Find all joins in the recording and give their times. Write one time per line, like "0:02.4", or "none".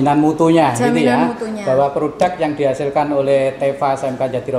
none